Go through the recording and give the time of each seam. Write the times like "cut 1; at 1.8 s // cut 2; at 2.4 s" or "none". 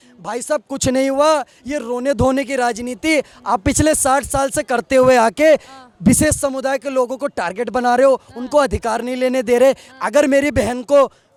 none